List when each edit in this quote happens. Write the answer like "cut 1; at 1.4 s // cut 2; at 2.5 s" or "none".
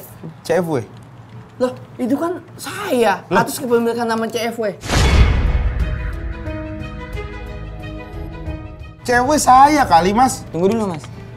none